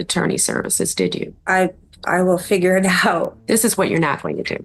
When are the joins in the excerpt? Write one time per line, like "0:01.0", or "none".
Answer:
0:01.4
0:03.4